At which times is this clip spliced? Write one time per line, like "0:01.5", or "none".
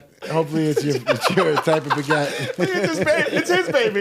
none